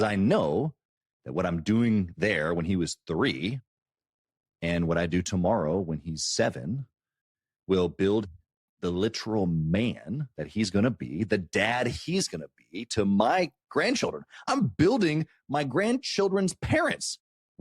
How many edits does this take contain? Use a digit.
1